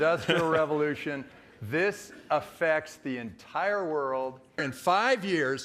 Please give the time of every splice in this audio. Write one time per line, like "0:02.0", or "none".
0:04.7